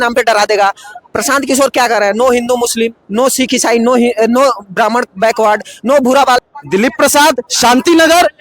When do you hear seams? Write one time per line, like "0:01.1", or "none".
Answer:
0:06.4

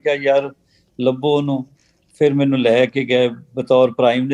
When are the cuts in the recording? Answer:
none

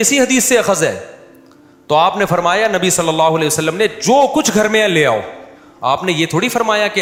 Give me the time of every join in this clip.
none

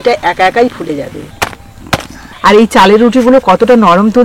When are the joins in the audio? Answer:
0:01.2
0:02.2

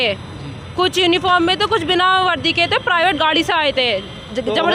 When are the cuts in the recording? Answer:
none

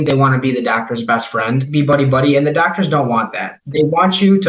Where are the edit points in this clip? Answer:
0:01.6
0:03.6

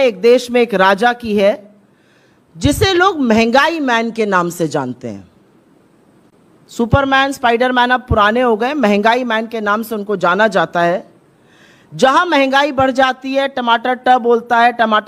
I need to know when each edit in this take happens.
none

